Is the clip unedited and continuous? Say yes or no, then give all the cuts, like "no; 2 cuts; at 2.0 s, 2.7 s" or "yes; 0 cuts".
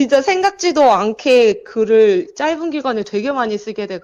yes; 0 cuts